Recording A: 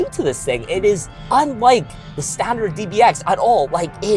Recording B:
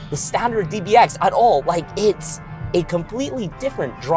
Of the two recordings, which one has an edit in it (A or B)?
A